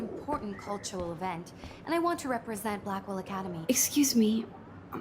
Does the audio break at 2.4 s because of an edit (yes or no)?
no